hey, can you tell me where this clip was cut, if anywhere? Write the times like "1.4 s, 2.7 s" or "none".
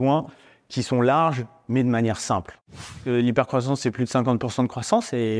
2.9 s

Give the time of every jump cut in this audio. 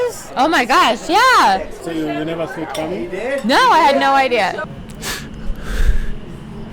1.8 s, 4.6 s

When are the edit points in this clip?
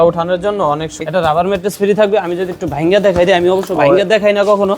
1.0 s

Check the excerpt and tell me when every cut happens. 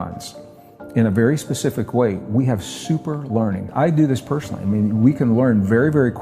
3.7 s

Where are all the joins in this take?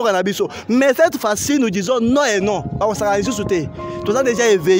none

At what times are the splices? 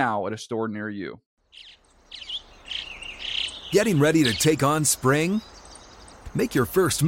1.2 s

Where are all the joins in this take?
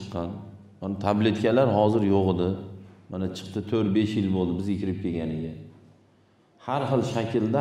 none

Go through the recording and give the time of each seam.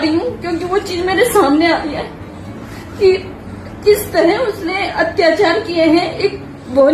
none

